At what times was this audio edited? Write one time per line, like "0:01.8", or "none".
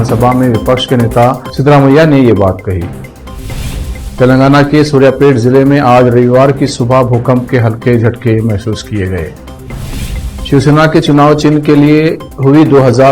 none